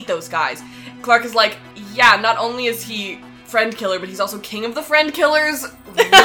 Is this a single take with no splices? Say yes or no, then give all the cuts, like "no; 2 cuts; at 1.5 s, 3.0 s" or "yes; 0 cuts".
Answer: no; 1 cut; at 1.0 s